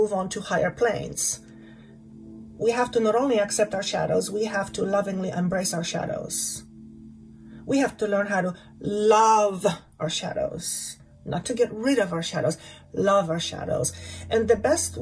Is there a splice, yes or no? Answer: no